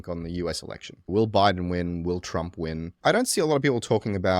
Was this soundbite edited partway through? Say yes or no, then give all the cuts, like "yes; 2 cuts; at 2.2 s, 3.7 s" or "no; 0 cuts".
yes; 2 cuts; at 1.1 s, 2.9 s